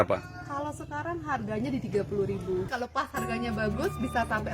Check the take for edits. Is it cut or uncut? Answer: cut